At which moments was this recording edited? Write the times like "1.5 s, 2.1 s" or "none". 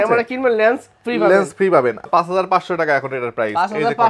2.0 s